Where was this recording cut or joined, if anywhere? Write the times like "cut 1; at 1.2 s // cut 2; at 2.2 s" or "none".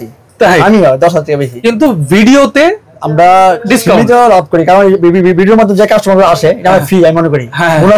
cut 1; at 1.5 s